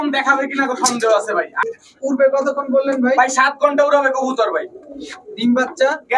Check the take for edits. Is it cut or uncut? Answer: cut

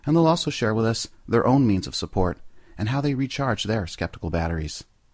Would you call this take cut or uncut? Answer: cut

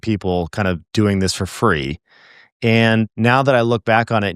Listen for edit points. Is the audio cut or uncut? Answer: cut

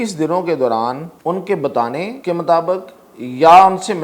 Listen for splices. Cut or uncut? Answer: cut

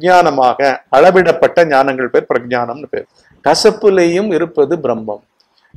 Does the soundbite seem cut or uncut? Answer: cut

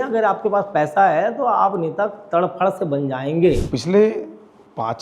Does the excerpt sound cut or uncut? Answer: cut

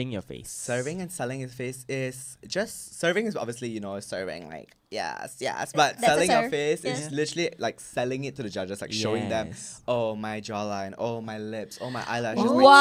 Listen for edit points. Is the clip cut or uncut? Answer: uncut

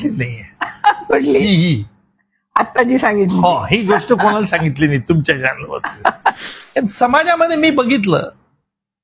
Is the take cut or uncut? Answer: cut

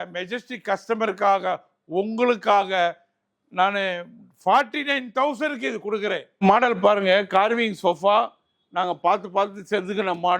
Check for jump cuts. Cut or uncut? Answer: cut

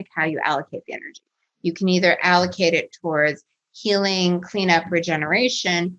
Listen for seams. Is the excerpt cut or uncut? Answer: uncut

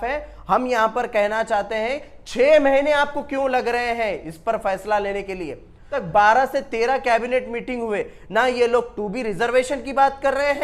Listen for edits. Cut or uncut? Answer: cut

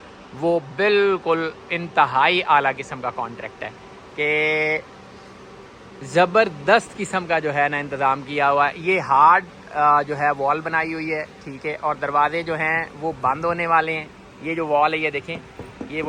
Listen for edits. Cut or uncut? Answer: uncut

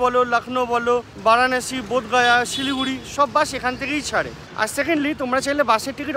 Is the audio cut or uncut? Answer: uncut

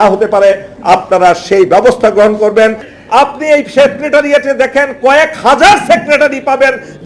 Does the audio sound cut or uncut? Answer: cut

